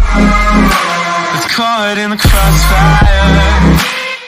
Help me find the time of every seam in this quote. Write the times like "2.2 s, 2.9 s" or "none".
1.3 s